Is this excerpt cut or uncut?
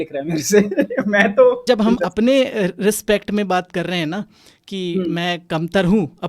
cut